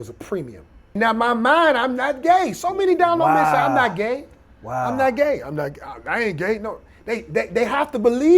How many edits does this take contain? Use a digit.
1